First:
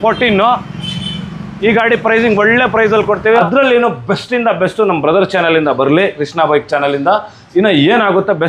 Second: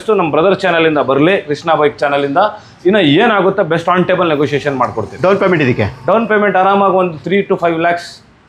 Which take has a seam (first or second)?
first